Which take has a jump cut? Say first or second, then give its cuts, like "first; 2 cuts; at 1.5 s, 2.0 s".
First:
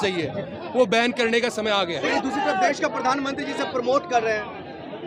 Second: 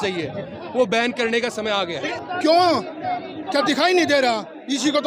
second; 1 cut; at 2.1 s